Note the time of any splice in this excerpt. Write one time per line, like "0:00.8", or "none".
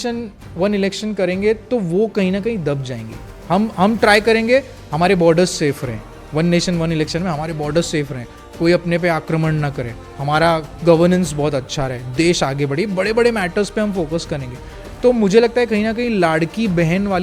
none